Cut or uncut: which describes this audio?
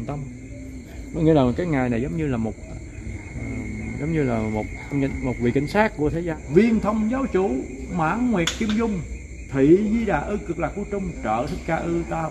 cut